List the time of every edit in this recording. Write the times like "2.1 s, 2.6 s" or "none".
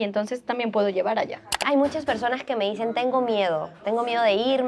1.5 s